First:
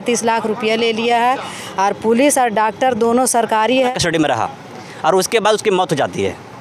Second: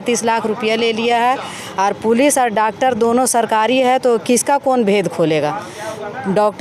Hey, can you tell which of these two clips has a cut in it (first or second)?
first